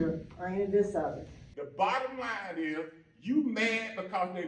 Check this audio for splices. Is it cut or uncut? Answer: cut